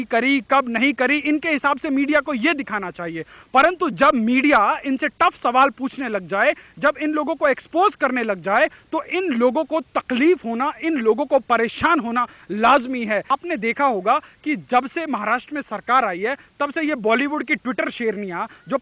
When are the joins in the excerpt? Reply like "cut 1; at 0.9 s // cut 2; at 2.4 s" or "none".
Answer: cut 1; at 13.3 s